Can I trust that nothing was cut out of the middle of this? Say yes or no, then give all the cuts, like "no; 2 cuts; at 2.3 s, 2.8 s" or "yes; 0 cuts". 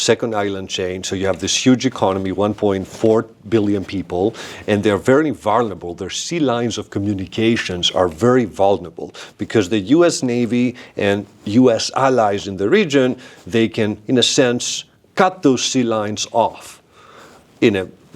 yes; 0 cuts